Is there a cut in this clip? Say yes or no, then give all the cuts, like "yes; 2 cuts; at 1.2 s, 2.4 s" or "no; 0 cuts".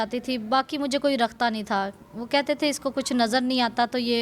no; 0 cuts